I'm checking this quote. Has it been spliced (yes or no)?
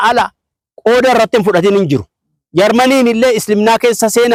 no